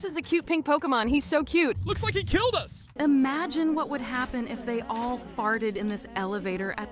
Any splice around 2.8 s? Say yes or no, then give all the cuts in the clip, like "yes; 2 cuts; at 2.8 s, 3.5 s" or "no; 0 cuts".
yes; 2 cuts; at 1.9 s, 2.8 s